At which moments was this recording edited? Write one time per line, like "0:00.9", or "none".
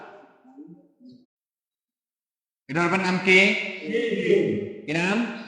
0:01.3